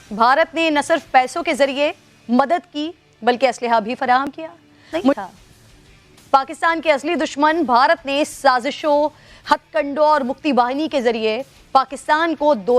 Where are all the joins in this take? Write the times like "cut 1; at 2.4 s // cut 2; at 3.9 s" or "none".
cut 1; at 5.2 s